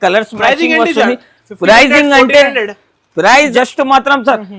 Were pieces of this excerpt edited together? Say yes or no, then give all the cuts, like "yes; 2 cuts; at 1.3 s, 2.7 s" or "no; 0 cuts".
yes; 1 cut; at 3.5 s